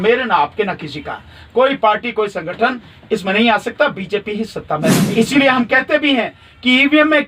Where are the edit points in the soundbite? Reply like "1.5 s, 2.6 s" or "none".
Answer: 5.0 s